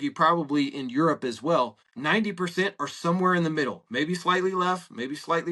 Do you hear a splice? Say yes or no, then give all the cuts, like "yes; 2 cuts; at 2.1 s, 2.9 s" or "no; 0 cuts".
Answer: yes; 1 cut; at 1.9 s